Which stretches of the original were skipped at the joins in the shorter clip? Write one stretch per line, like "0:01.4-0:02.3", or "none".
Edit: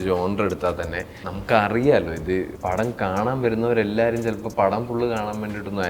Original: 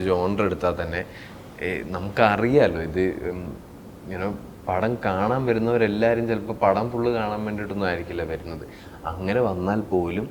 0:01.3-0:01.9
0:03.2-0:04.6